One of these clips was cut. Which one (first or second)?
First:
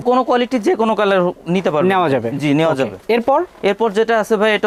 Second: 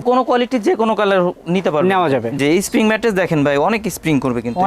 second